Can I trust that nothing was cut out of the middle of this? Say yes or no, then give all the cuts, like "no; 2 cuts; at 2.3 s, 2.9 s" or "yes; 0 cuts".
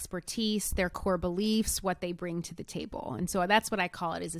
yes; 0 cuts